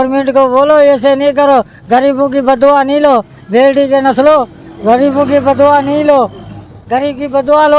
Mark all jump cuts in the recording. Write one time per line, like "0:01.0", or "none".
none